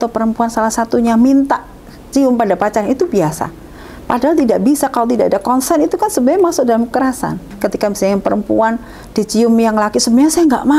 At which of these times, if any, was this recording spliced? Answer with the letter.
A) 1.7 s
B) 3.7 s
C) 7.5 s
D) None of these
C